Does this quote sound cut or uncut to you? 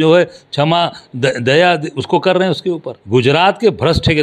cut